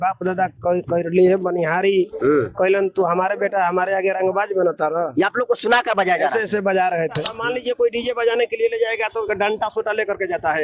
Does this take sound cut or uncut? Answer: cut